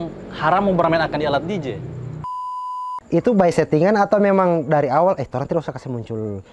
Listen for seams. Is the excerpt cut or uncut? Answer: cut